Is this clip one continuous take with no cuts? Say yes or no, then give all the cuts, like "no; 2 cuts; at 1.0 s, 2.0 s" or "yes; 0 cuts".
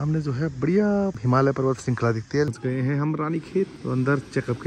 no; 3 cuts; at 1.2 s, 2.5 s, 3.8 s